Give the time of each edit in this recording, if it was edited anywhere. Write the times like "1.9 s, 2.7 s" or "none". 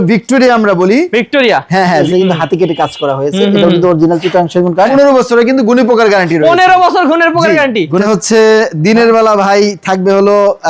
2.1 s, 4.9 s, 8.0 s